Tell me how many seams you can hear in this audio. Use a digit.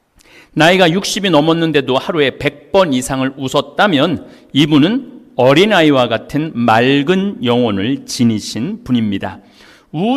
0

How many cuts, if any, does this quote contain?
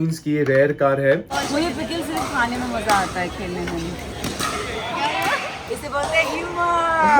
1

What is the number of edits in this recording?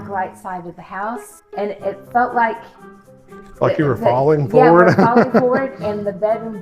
1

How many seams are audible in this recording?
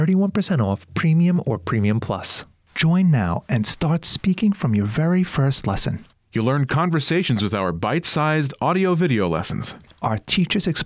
1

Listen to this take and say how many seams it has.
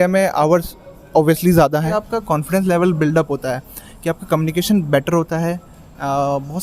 1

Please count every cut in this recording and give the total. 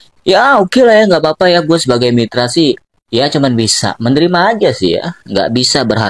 0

